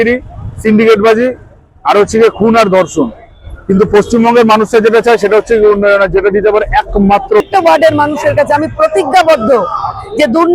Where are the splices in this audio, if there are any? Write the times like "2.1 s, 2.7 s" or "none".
7.4 s